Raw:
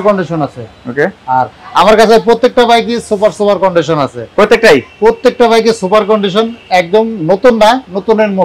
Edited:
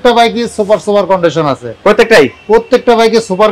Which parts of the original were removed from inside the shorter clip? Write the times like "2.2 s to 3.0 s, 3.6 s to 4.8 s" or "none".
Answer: none